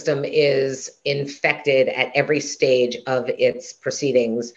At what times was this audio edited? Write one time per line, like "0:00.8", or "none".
none